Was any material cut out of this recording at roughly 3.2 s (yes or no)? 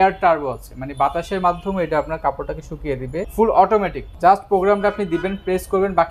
yes